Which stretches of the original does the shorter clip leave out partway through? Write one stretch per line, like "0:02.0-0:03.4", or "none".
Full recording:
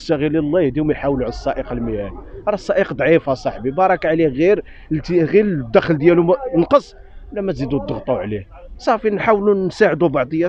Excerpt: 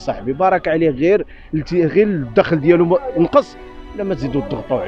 none